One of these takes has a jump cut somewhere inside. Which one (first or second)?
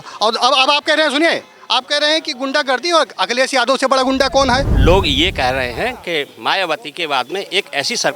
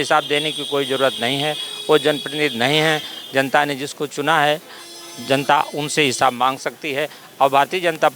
first